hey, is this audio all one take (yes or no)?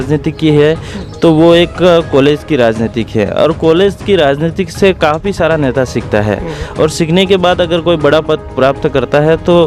yes